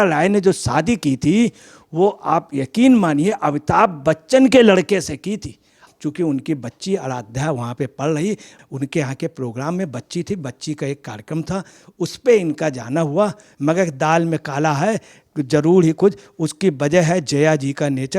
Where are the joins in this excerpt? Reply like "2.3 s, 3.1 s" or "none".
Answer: 5.8 s, 8.5 s, 13.5 s